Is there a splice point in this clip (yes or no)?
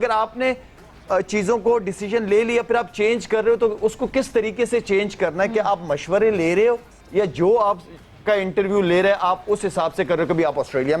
no